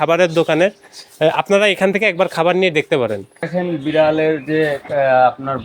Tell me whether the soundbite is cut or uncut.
cut